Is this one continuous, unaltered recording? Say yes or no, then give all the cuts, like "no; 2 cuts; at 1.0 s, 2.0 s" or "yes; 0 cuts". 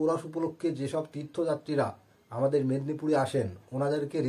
yes; 0 cuts